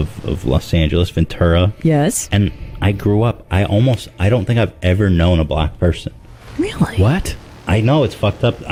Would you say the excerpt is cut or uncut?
uncut